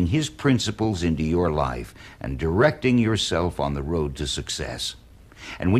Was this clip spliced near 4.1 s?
yes; 1 cut; at 4.1 s

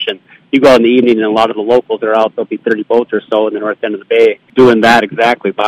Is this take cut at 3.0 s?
no; 1 cut; at 4.4 s

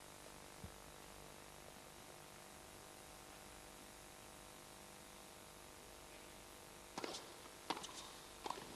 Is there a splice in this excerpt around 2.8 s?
yes; 1 cut; at 2.8 s

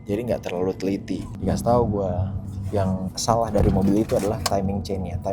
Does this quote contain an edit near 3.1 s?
yes; 2 cuts; at 1.3 s, 3.1 s

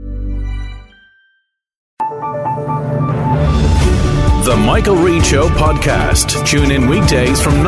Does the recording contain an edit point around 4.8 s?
no; 1 cut; at 1.9 s

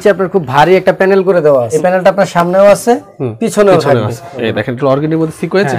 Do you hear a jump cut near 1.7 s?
yes; 2 cuts; at 1.7 s, 4.3 s

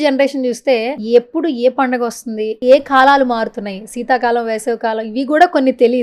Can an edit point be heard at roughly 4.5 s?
no; 2 cuts; at 1.0 s, 2.5 s

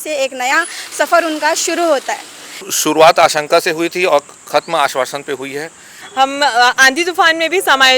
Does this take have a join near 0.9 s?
no; 2 cuts; at 2.7 s, 6.0 s

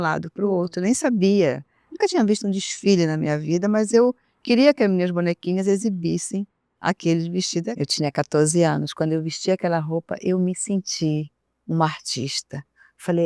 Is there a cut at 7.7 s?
yes; 1 cut; at 7.7 s

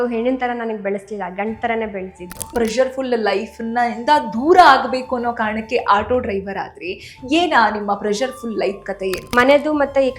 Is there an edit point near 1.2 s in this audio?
no; 2 cuts; at 2.5 s, 9.3 s

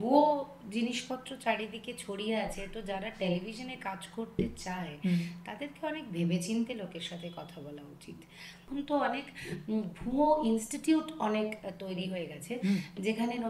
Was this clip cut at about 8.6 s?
yes; 1 cut; at 8.6 s

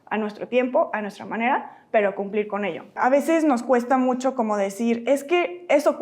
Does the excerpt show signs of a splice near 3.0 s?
yes; 1 cut; at 3.0 s

